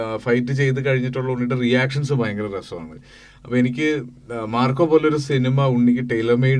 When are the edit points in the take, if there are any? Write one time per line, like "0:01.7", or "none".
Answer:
none